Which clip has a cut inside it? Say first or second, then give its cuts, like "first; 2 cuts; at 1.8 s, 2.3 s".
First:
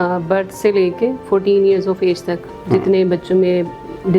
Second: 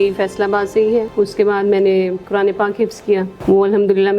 second; 3 cuts; at 1.1 s, 2.2 s, 3.3 s